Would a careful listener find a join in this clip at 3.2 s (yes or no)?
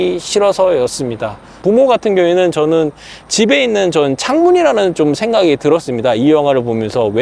no